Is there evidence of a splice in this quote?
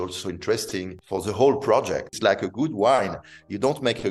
yes; 2 cuts; at 1.0 s, 2.1 s

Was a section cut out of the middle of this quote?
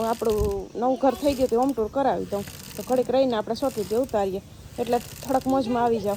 no; 0 cuts

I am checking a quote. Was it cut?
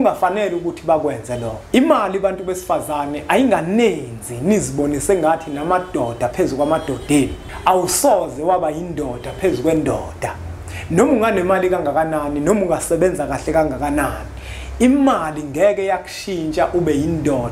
yes; 2 cuts; at 1.5 s, 7.4 s

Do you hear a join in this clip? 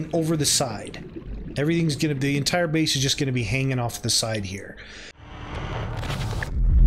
yes; 1 cut; at 5.2 s

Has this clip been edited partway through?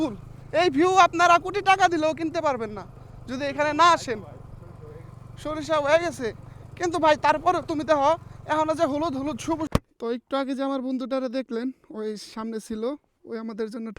yes; 1 cut; at 9.7 s

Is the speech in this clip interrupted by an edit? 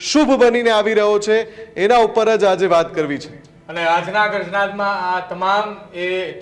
no; 0 cuts

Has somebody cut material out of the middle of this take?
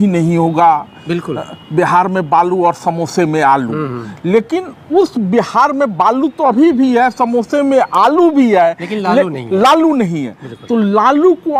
no; 0 cuts

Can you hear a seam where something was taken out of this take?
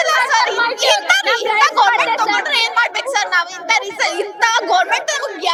no; 0 cuts

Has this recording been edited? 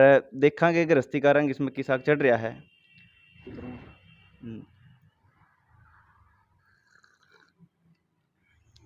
no; 0 cuts

